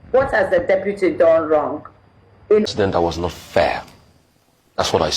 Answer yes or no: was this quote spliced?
yes